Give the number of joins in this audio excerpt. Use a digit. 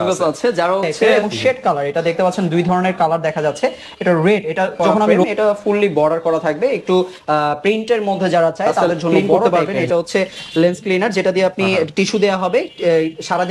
3